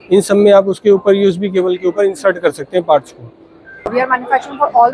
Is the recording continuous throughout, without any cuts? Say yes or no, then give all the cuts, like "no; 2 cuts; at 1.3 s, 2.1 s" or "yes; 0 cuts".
no; 1 cut; at 3.9 s